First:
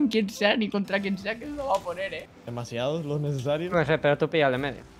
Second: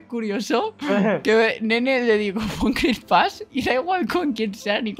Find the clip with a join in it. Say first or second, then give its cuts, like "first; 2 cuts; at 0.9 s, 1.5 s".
first; 1 cut; at 2.3 s